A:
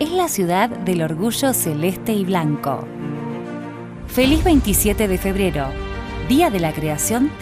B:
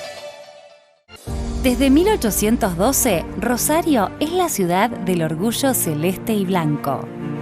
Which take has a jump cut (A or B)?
B